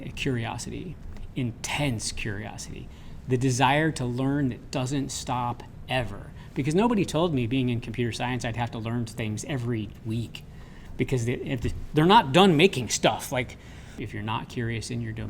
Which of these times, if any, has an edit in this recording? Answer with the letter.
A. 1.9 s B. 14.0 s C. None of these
B